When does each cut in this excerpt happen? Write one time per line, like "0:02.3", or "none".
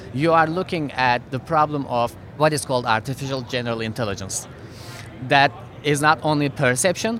0:02.2